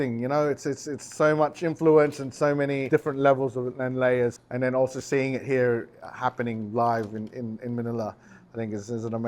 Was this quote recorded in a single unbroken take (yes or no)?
no